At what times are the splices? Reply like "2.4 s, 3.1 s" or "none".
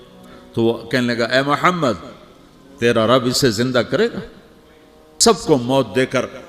5.1 s